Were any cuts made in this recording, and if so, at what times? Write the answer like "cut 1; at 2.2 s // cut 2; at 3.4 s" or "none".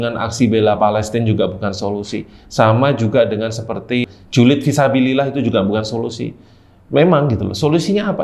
cut 1; at 4.0 s